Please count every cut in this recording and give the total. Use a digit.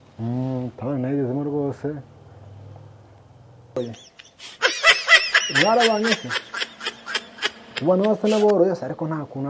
1